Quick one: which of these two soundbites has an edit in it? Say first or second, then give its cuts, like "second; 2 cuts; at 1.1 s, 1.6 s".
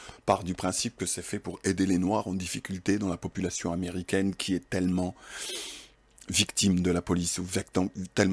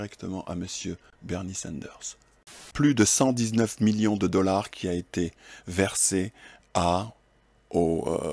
second; 1 cut; at 2.6 s